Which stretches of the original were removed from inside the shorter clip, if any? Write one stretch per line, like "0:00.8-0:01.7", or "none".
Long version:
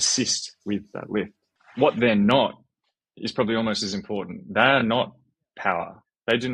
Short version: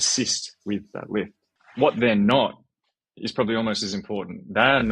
none